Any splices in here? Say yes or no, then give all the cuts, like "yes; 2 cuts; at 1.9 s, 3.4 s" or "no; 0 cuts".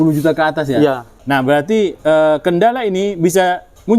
yes; 1 cut; at 1.1 s